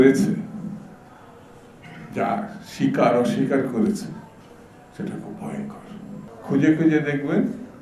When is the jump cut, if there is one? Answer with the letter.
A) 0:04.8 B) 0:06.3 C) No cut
B